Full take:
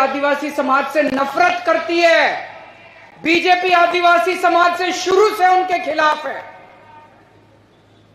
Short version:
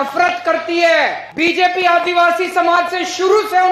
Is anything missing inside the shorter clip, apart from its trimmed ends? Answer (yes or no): yes